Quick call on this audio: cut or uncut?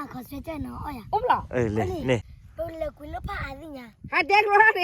cut